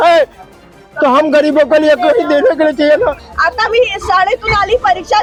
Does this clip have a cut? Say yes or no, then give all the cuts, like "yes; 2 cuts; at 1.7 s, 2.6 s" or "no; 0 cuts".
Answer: no; 0 cuts